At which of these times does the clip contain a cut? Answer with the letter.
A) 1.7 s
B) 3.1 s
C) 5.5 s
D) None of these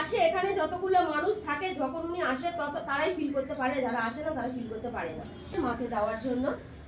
C